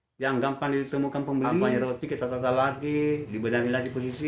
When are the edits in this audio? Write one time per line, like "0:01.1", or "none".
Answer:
0:01.7